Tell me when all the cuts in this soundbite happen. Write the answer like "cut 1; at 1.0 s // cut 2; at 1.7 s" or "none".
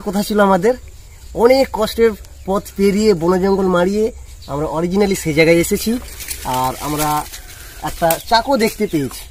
none